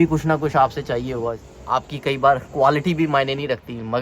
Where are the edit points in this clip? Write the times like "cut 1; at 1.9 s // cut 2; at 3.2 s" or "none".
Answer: cut 1; at 1.5 s